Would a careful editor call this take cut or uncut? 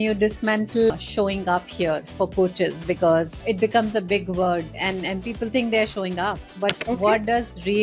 cut